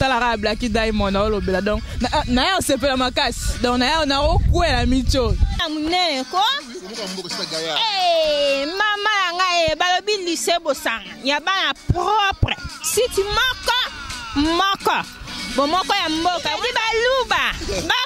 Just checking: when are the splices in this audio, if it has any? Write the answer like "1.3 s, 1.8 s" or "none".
5.6 s